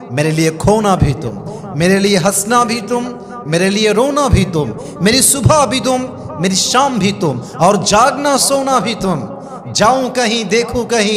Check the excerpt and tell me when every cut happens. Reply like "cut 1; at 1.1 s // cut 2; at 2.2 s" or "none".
none